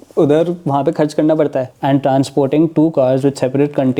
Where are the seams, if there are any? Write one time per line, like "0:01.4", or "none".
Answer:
0:01.7